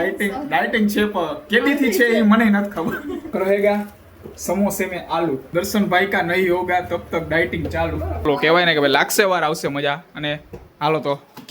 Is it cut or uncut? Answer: cut